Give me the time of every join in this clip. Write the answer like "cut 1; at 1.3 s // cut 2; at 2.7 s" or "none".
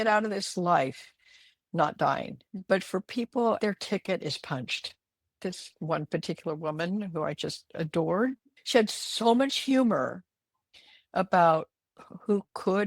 cut 1; at 2.4 s // cut 2; at 3.6 s // cut 3; at 5.4 s